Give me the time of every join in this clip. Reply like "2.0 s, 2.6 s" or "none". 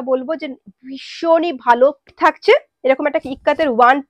2.1 s